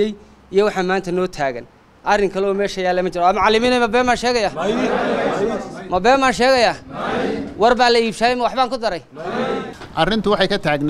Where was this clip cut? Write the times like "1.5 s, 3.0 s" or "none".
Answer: 9.8 s